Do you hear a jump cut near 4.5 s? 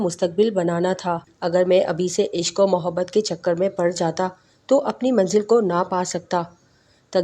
no; 1 cut; at 1.3 s

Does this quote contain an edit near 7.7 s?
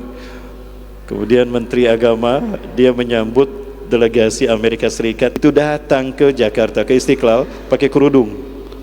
no; 1 cut; at 5.3 s

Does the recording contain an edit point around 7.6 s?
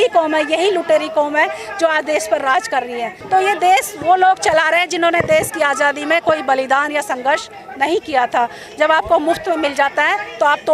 no; 1 cut; at 3.1 s

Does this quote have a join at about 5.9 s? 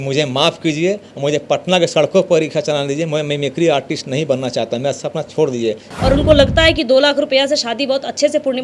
yes; 1 cut; at 5.9 s

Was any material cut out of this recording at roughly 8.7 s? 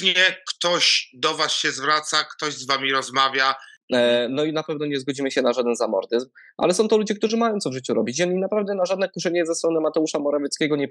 no; 1 cut; at 3.7 s

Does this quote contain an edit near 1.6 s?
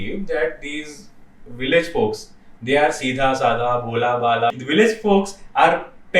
no; 1 cut; at 4.5 s

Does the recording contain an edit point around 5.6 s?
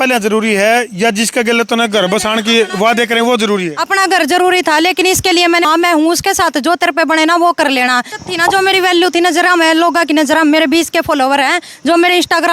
yes; 2 cuts; at 5.6 s, 8.1 s

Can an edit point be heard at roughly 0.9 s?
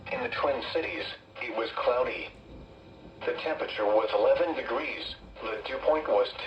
yes; 1 cut; at 0.9 s

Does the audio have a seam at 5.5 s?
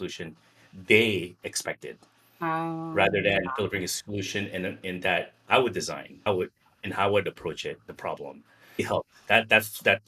no; 1 cut; at 8.8 s

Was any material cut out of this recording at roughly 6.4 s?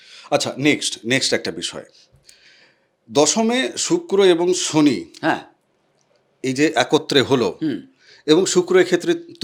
no; 0 cuts

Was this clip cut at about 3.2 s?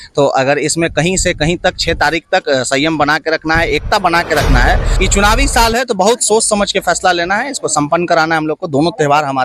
no; 1 cut; at 4.9 s

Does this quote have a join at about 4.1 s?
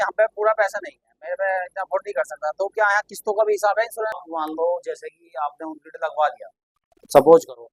yes; 1 cut; at 4.1 s

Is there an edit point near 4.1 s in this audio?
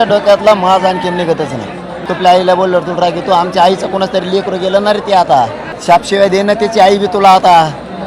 no; 2 cuts; at 2.0 s, 5.7 s

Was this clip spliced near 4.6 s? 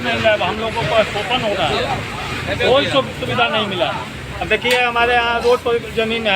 no; 0 cuts

